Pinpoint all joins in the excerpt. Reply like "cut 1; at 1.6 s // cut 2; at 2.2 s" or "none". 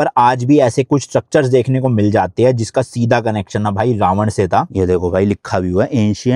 cut 1; at 4.7 s